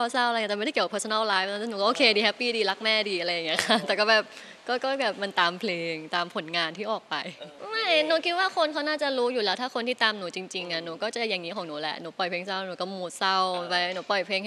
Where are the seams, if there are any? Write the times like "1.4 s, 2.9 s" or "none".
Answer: 7.5 s